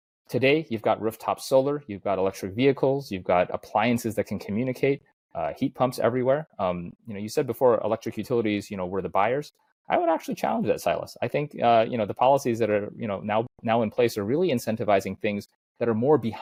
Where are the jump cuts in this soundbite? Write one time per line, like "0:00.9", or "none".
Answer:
none

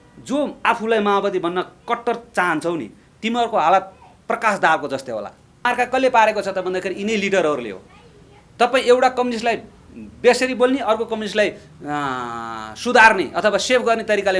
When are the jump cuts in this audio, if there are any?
0:05.6

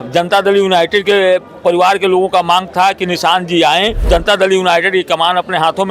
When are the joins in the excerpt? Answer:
0:04.0

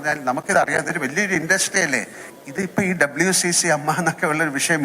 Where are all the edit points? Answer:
0:02.2

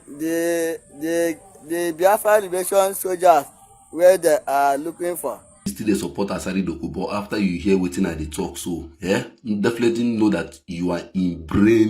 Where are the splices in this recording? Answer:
0:05.7

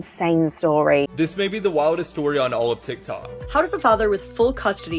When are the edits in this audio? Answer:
0:01.1
0:03.4

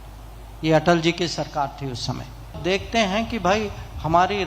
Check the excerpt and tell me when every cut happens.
0:02.6

